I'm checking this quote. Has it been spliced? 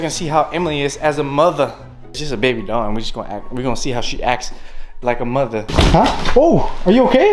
yes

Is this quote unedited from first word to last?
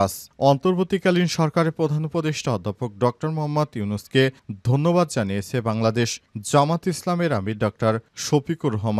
yes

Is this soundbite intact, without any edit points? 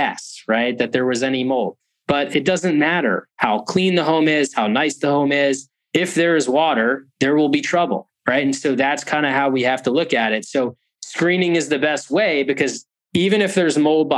yes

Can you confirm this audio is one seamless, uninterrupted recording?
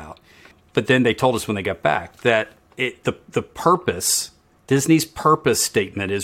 yes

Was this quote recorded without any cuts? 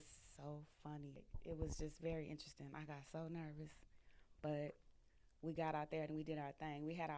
no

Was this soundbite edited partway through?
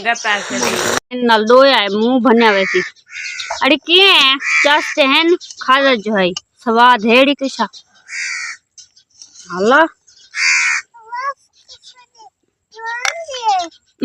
yes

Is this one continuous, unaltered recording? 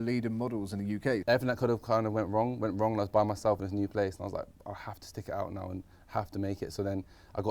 no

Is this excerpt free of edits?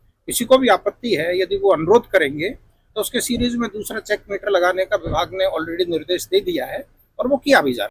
yes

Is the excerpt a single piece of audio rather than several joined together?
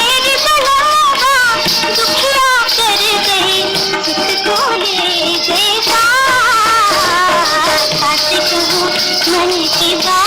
yes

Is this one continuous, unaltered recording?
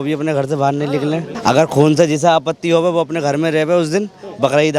no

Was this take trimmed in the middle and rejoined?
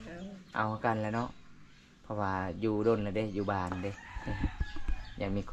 no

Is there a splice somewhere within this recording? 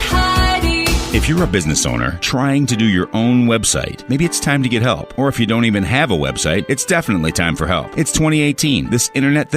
yes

